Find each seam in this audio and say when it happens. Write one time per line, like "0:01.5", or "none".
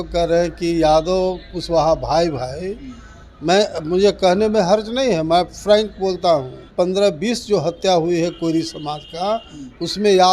0:06.7

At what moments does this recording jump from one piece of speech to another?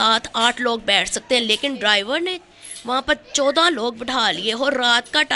none

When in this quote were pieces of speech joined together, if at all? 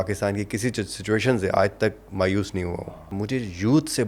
0:03.1

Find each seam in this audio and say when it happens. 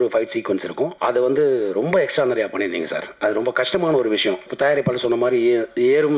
0:01.0
0:04.5

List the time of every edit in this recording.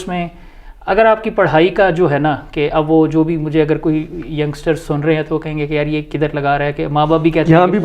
none

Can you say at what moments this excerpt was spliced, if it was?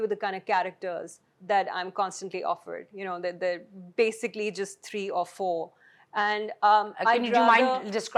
none

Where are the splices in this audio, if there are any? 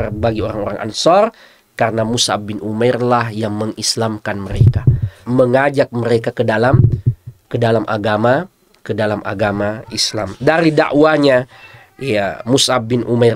0:05.2

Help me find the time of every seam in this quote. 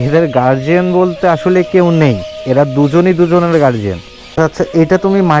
0:04.3

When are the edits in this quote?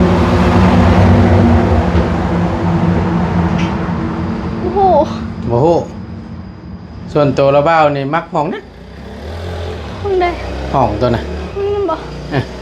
none

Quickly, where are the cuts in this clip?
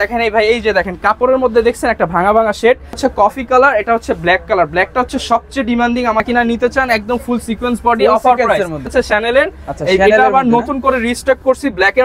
0:03.0
0:06.2
0:08.9

